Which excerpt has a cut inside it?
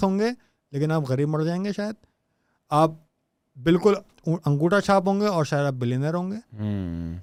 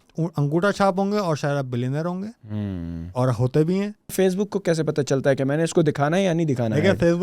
second; 1 cut; at 4.1 s

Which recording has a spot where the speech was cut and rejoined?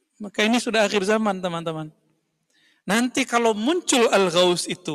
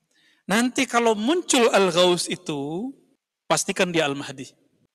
second; 1 cut; at 3.6 s

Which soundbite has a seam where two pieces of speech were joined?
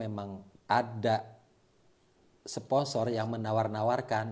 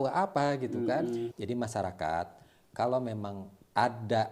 second; 1 cut; at 1.3 s

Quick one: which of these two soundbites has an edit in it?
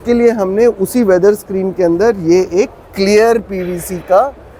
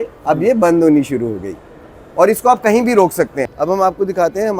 second; 1 cut; at 3.4 s

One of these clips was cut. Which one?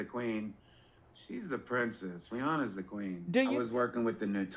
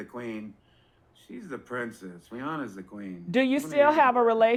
first; 1 cut; at 3.5 s

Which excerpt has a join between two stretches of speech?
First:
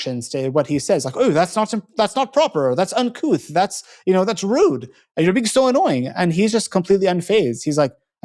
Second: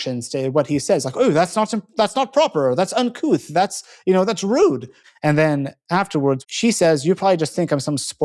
second; 2 cuts; at 5.0 s, 6.4 s

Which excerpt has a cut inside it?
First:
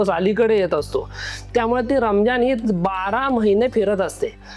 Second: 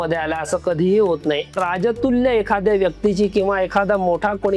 second; 1 cut; at 1.6 s

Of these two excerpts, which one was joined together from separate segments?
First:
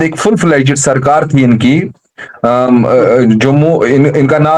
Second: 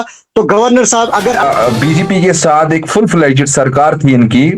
second; 1 cut; at 1.4 s

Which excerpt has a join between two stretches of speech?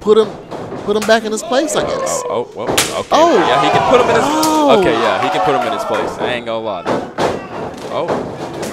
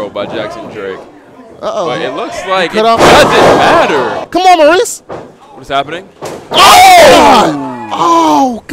second; 1 cut; at 4.2 s

